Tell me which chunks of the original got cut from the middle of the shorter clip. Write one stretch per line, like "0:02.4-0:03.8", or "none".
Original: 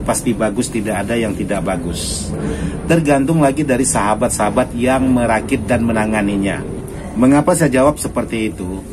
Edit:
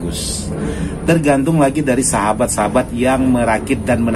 none